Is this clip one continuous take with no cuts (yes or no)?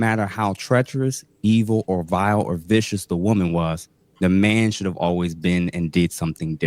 yes